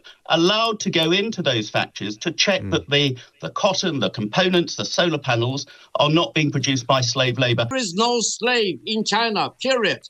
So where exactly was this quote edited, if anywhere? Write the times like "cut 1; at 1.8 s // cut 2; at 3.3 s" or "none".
cut 1; at 7.7 s